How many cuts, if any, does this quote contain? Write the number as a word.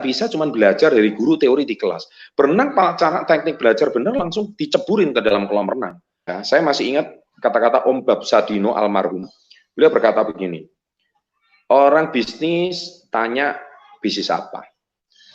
one